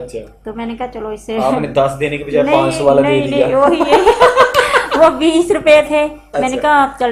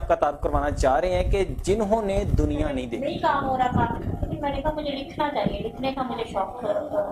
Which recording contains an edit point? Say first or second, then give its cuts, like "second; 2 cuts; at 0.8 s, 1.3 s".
second; 1 cut; at 2.9 s